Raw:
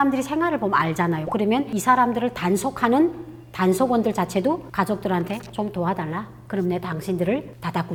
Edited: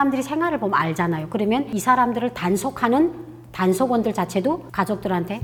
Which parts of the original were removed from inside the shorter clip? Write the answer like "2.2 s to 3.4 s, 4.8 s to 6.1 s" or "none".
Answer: none